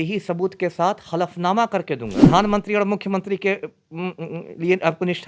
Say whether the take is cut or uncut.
cut